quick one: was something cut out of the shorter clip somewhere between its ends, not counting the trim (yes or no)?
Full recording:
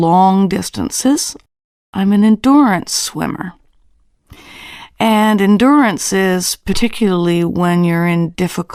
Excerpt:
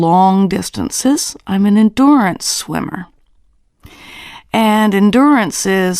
yes